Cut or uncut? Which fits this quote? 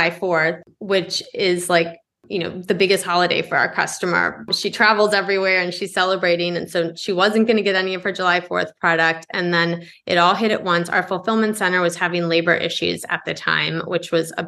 uncut